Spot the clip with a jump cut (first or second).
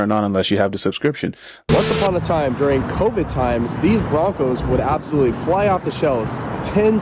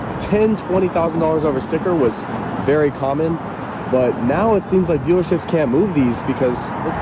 first